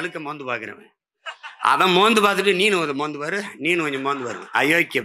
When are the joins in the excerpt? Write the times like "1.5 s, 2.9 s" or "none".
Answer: none